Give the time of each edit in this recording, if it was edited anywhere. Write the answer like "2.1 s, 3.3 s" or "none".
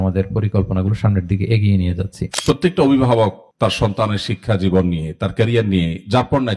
2.3 s